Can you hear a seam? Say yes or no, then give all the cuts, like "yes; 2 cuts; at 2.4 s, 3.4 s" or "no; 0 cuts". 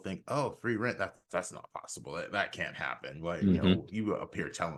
no; 0 cuts